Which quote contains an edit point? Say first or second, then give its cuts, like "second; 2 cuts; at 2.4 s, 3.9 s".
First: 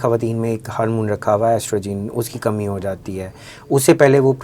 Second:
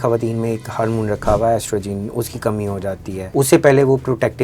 second; 1 cut; at 3.2 s